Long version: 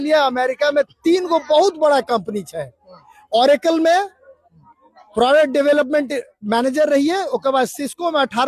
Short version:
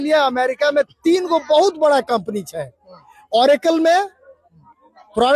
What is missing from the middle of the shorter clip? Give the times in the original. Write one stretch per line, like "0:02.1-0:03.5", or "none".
none